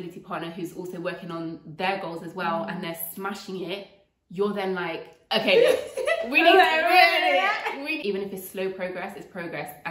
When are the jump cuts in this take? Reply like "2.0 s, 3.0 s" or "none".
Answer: 7.9 s